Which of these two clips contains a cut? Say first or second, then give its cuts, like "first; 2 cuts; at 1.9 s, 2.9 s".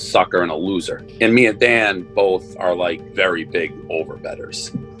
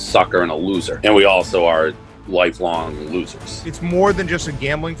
second; 2 cuts; at 0.9 s, 3.6 s